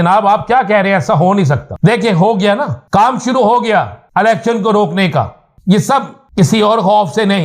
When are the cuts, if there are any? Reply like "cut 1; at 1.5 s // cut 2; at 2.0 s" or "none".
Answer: cut 1; at 1.7 s // cut 2; at 2.8 s // cut 3; at 4.0 s // cut 4; at 5.4 s // cut 5; at 6.2 s